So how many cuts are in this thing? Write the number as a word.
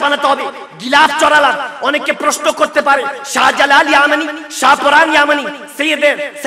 zero